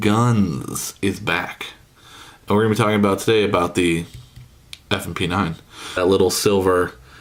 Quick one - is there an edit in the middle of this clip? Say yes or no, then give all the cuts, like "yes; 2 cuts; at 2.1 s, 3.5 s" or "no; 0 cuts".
no; 0 cuts